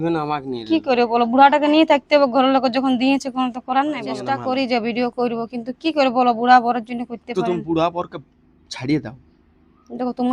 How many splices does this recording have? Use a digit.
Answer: 1